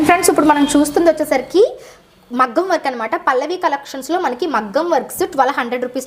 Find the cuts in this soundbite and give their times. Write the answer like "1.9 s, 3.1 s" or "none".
none